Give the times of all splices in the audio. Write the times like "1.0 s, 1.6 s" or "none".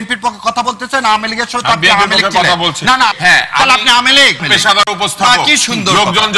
3.1 s, 4.4 s